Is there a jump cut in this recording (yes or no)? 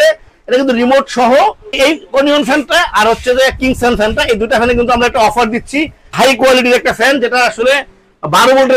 yes